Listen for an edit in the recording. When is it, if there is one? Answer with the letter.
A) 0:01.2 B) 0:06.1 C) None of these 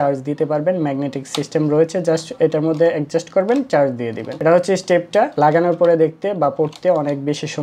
C